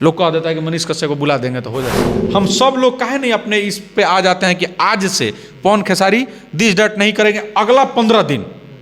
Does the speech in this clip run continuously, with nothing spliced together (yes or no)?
no